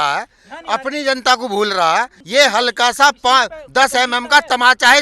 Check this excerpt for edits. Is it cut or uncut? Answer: cut